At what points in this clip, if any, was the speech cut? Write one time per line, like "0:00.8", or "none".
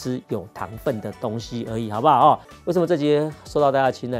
0:02.5